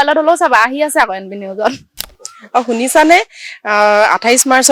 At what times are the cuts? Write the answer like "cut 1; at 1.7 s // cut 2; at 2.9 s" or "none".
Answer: cut 1; at 1.9 s